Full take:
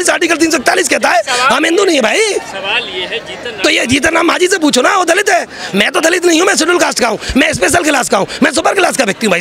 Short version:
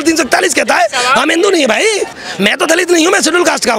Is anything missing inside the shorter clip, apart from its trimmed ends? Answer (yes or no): yes